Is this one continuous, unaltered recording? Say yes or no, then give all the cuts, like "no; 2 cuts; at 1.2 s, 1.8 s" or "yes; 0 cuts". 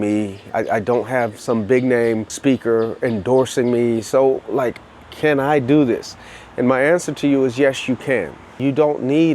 no; 1 cut; at 8.5 s